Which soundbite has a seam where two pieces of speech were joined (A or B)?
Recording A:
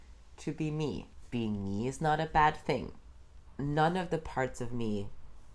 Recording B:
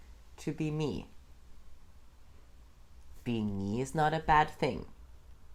A